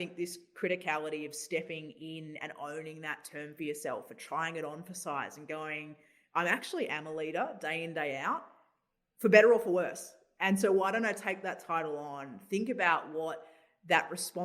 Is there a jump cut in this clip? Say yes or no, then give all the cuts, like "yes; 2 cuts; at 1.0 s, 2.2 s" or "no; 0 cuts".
no; 0 cuts